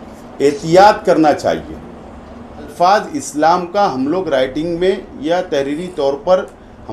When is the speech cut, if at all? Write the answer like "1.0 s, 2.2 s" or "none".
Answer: 2.7 s